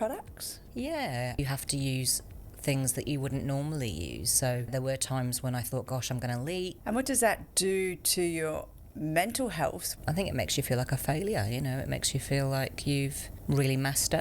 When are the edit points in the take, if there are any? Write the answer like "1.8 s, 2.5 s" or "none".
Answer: 1.4 s, 4.7 s, 6.8 s, 7.5 s, 9.8 s, 13.3 s